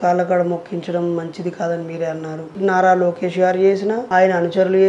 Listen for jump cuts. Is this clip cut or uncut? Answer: cut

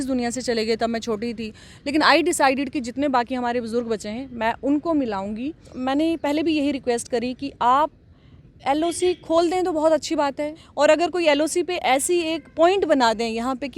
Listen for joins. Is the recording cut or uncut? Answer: cut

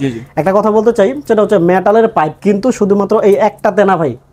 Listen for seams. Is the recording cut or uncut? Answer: uncut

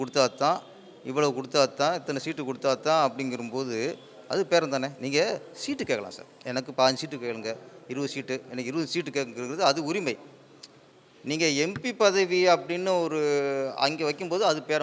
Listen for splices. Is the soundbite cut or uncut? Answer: uncut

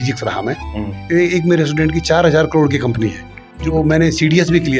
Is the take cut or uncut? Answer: cut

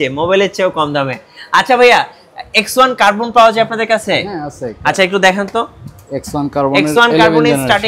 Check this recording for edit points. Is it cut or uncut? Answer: uncut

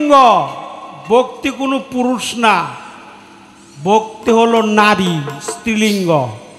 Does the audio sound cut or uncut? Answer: uncut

